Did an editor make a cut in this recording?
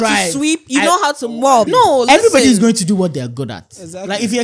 yes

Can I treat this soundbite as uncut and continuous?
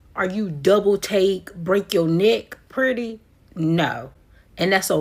yes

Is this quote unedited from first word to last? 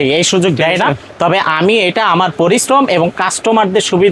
yes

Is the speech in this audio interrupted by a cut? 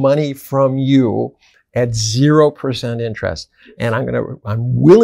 no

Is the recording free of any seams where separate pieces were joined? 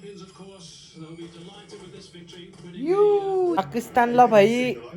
no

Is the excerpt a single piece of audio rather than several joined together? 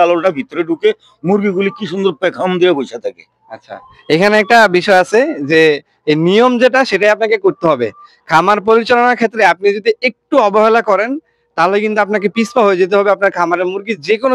yes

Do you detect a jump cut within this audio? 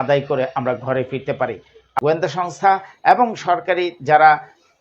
yes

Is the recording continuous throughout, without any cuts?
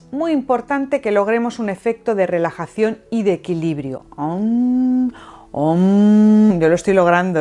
no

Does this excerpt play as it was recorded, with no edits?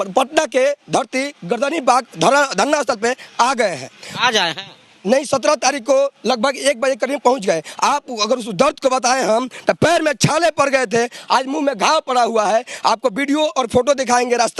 yes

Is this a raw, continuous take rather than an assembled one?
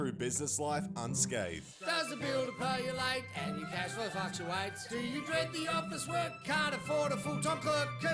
yes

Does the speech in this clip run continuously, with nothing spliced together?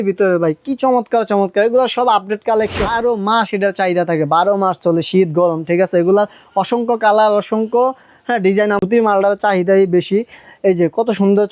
no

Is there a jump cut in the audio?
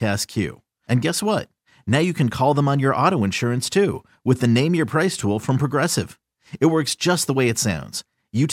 no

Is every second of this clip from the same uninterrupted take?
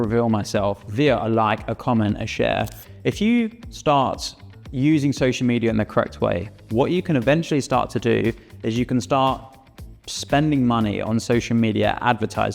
no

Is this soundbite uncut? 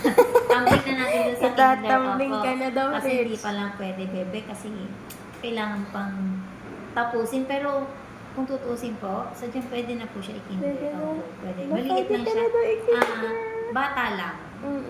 yes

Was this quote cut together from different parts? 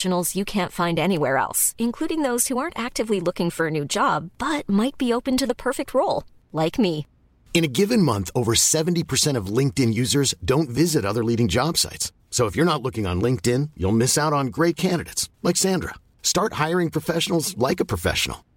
no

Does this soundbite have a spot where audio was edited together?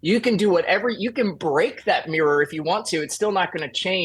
no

